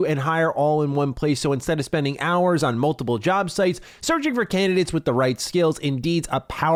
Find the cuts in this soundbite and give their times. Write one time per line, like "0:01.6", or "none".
none